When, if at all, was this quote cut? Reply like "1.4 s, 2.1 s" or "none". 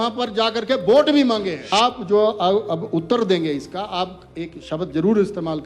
1.6 s